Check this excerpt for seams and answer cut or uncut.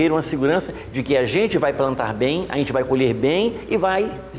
uncut